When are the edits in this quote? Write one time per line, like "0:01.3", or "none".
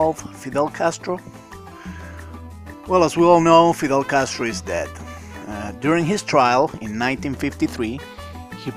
0:06.5